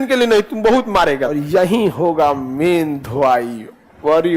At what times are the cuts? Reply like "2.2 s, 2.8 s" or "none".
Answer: 1.4 s